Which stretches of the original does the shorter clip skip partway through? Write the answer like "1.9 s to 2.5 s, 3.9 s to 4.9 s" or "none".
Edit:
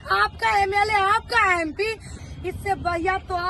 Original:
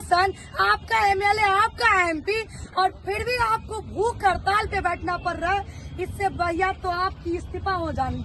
2.6 s to 5.7 s